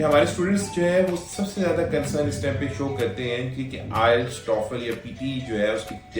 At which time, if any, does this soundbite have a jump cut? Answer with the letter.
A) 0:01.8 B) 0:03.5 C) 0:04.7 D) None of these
D